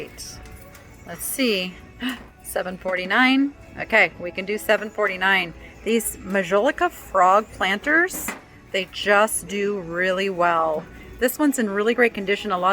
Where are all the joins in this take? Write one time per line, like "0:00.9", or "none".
none